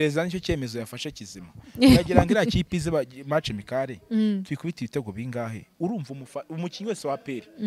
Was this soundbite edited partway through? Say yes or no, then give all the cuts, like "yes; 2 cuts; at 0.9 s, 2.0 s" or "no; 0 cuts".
no; 0 cuts